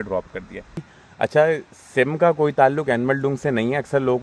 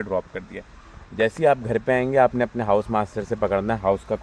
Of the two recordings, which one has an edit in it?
first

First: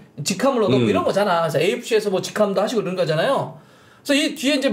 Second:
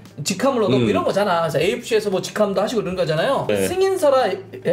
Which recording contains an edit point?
second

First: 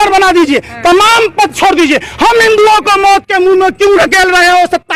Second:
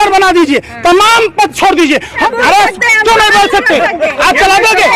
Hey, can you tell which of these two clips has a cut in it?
second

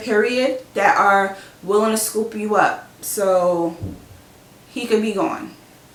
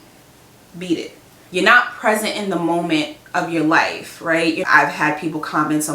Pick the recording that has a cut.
second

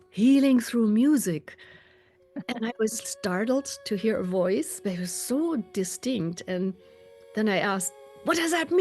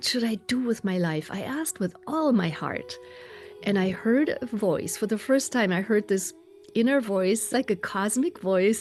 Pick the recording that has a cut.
first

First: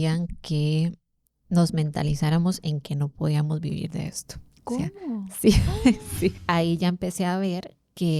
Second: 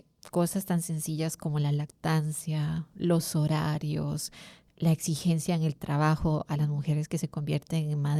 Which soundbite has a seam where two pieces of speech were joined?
first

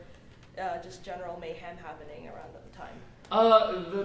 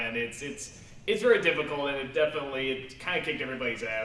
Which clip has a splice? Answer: first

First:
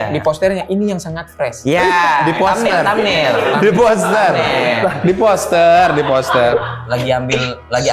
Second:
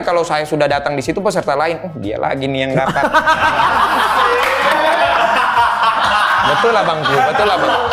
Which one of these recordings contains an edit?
first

